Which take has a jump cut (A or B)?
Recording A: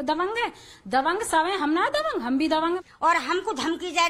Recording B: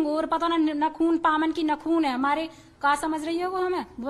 A